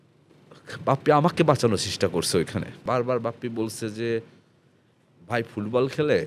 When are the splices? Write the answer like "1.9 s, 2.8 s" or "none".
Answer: 2.8 s